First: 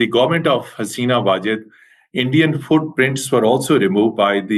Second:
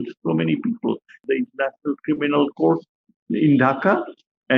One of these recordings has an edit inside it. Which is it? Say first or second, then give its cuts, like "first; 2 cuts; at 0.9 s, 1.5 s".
second; 1 cut; at 1.1 s